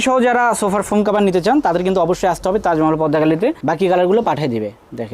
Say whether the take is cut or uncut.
cut